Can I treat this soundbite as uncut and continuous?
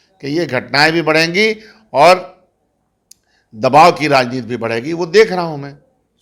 yes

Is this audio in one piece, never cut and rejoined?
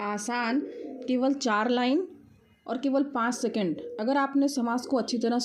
yes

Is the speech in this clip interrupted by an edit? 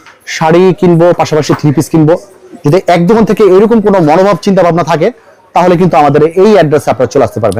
no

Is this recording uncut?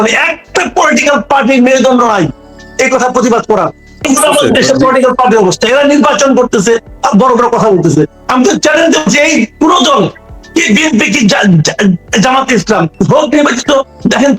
no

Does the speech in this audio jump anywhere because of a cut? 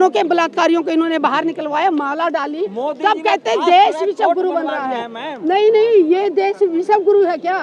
no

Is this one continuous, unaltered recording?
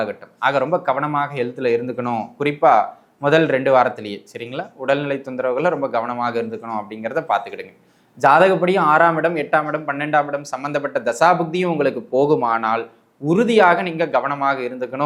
yes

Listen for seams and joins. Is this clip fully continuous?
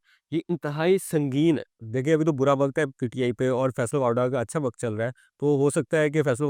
yes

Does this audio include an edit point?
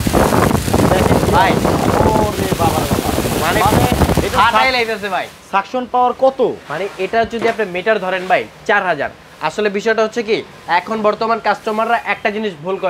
no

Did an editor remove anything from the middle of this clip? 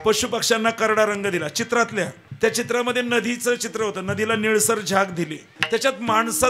yes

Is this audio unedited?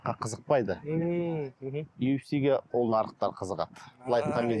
yes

